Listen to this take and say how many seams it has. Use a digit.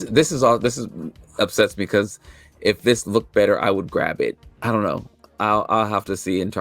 1